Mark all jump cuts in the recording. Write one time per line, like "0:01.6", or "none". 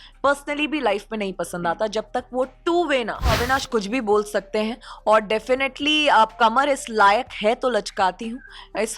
0:03.4

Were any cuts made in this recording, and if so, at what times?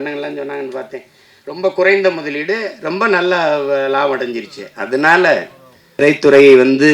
0:06.0

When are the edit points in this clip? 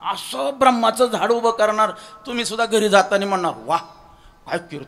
none

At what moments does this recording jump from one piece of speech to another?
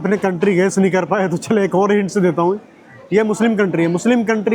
none

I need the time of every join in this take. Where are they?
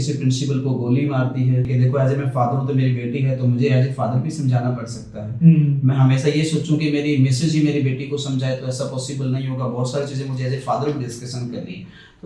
0:01.7

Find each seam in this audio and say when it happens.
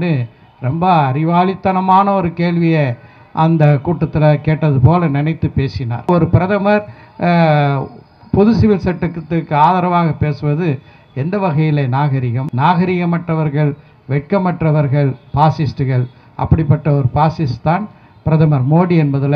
0:06.1
0:12.4

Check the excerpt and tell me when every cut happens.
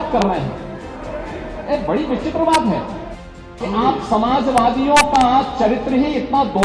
0:03.6

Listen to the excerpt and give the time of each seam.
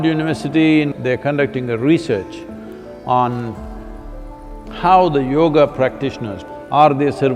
0:00.9
0:06.3

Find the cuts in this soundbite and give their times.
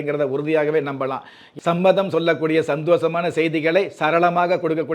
0:01.5

